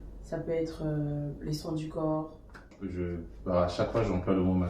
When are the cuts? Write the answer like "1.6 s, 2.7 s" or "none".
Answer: 2.8 s